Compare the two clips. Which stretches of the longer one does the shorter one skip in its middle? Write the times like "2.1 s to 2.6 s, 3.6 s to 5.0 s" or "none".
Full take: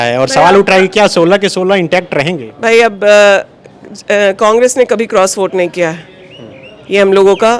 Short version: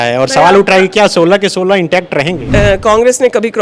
2.4 s to 4.0 s